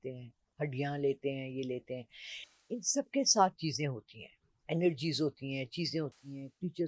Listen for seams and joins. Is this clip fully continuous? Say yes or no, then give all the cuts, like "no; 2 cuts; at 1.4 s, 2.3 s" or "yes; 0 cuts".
yes; 0 cuts